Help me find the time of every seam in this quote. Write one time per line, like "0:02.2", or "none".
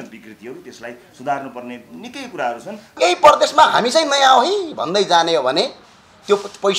0:03.0